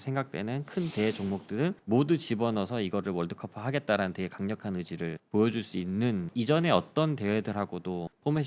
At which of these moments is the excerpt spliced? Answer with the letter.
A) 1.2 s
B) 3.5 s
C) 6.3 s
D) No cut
C